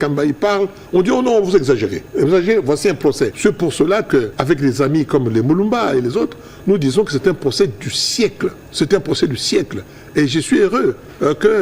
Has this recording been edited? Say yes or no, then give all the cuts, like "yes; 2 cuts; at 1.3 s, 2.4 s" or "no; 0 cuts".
yes; 4 cuts; at 2.0 s, 3.3 s, 4.3 s, 8.6 s